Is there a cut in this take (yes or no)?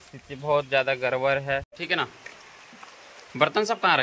yes